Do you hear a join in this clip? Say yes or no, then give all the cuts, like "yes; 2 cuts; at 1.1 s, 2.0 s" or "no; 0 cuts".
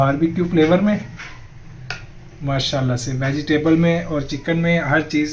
no; 0 cuts